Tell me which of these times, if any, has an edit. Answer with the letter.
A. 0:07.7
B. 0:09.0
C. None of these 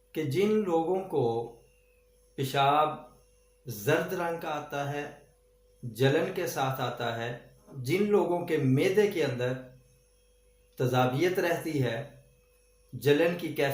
A